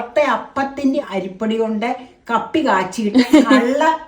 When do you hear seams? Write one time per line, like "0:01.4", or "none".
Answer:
0:01.0

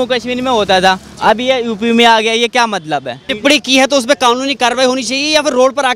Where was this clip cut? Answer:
0:03.2

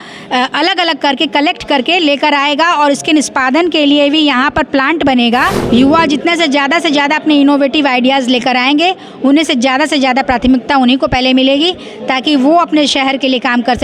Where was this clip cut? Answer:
0:05.6

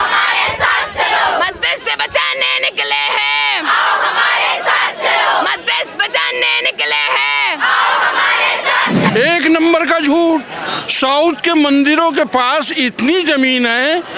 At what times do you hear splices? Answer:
0:09.1

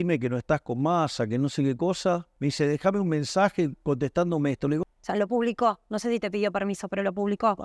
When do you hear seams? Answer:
0:02.3
0:04.8

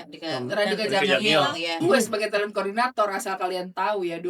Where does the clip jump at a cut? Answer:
0:01.8

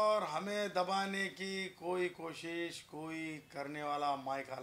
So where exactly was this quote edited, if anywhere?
none

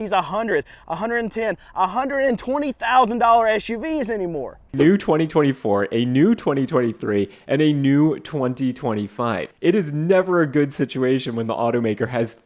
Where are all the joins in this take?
0:04.7
0:09.5

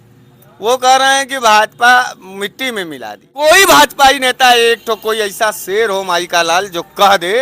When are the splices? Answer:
0:03.4

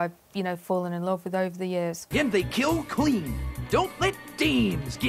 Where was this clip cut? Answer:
0:02.0

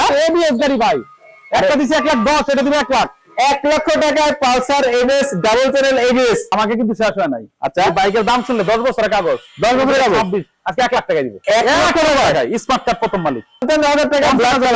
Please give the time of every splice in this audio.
0:06.5
0:11.3
0:13.6

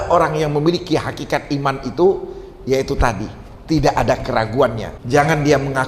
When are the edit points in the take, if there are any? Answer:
0:04.9

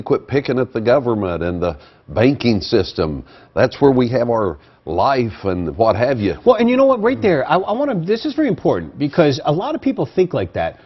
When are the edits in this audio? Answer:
none

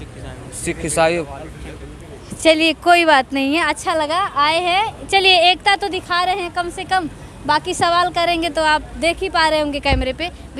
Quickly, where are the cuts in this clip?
none

